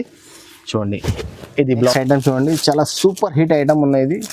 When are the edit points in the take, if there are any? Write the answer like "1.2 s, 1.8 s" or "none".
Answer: 1.7 s